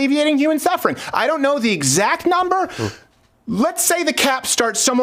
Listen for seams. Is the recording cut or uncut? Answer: uncut